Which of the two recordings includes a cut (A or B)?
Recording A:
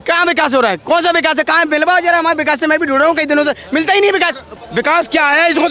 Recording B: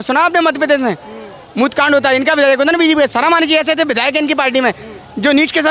A